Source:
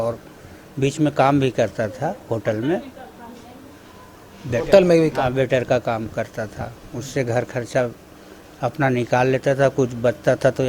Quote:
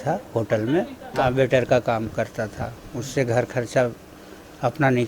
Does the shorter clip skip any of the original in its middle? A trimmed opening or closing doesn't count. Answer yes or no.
yes